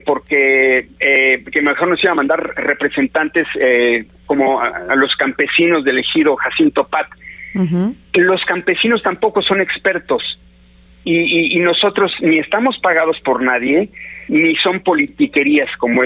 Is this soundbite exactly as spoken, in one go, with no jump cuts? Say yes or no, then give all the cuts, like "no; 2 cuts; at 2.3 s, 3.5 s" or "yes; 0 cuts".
yes; 0 cuts